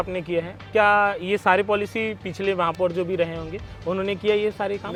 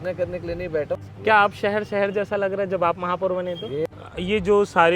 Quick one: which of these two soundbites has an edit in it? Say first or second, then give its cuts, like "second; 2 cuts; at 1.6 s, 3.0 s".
second; 2 cuts; at 1.0 s, 3.9 s